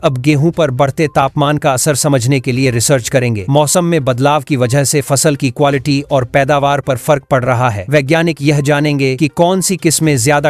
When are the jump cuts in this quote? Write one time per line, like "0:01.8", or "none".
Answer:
none